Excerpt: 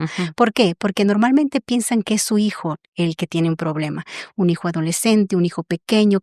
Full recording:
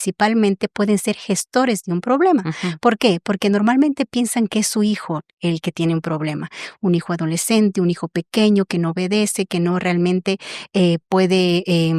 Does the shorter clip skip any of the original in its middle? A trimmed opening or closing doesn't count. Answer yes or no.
no